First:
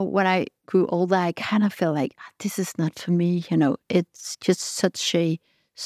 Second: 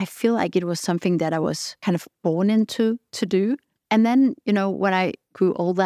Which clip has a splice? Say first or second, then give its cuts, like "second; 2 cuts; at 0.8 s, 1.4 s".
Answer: second; 2 cuts; at 1.7 s, 3.7 s